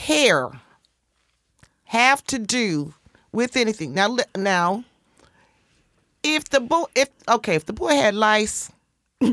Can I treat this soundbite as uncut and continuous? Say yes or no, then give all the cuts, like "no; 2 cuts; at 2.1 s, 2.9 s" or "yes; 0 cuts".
yes; 0 cuts